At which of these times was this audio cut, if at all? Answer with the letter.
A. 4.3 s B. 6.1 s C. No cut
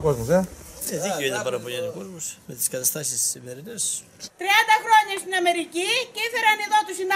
A